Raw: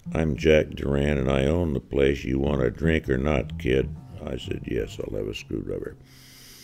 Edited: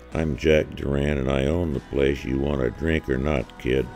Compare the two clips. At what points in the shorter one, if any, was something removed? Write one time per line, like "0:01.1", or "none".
none